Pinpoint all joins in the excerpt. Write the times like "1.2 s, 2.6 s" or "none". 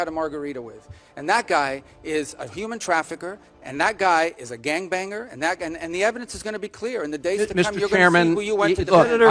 none